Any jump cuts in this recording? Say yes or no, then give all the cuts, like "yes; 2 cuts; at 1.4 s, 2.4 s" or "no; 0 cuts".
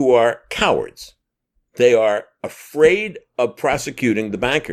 no; 0 cuts